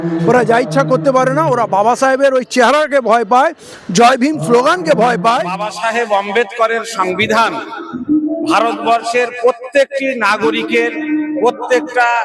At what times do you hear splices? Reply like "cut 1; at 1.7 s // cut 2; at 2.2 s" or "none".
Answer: cut 1; at 5.7 s